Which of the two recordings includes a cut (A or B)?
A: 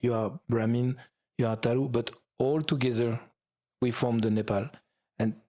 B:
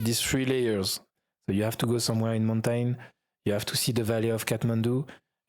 B